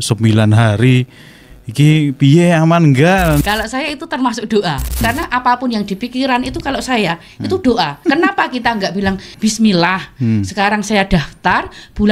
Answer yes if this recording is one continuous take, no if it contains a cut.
no